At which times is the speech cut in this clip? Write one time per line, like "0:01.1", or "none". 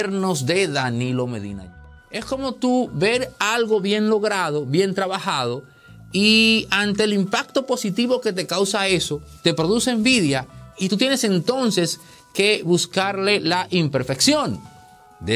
0:01.6